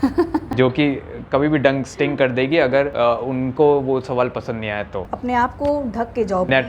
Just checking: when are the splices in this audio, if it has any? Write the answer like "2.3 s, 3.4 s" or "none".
5.0 s